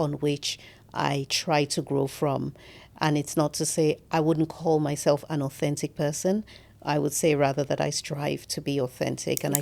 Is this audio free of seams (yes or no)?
yes